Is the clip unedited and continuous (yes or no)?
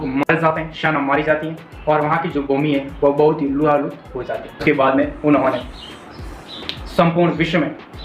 no